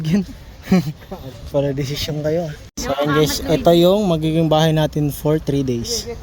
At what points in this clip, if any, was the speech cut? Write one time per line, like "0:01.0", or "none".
0:02.7